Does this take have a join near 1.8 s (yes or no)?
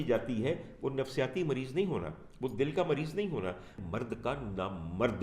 no